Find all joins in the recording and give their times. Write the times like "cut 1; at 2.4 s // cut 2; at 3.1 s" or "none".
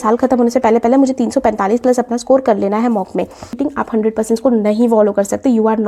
cut 1; at 3.5 s